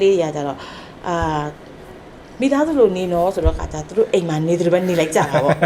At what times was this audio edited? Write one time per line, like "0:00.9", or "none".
none